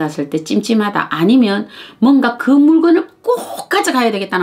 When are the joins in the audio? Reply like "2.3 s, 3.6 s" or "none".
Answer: none